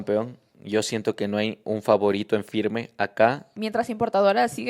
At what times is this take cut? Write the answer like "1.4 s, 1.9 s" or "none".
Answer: 3.5 s